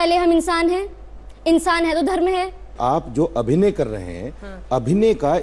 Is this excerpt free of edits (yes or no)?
no